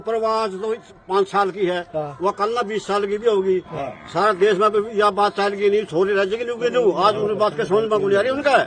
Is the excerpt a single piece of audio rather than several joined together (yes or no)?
yes